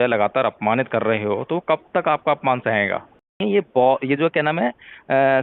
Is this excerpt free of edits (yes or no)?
no